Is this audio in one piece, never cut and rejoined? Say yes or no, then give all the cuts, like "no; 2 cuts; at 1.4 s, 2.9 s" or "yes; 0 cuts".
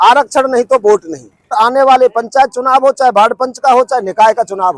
no; 1 cut; at 1.5 s